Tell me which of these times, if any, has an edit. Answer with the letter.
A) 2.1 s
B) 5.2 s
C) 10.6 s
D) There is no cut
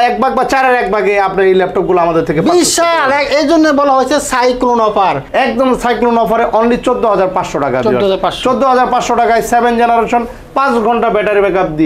B